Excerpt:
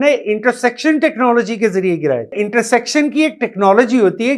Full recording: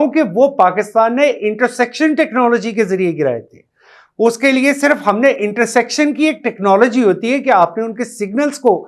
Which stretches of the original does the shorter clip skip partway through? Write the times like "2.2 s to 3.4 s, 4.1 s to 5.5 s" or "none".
3.5 s to 5.4 s